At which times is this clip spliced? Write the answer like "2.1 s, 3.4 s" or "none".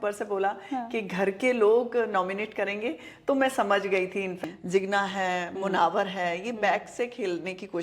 4.4 s